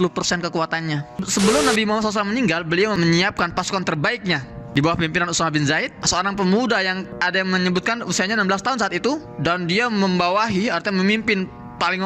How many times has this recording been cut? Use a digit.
2